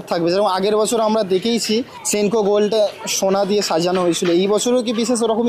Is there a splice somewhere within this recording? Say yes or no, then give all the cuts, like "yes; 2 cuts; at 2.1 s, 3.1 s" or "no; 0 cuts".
yes; 1 cut; at 2.0 s